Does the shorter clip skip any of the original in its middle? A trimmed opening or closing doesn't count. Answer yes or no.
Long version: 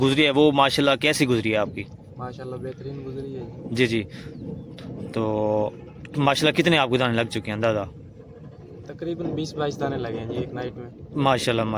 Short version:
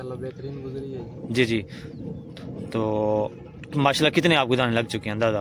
no